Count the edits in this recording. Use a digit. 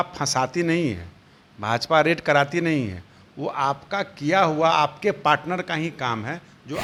0